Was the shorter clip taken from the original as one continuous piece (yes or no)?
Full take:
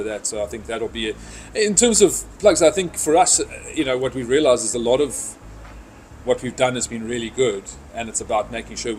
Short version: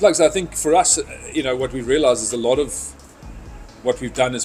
yes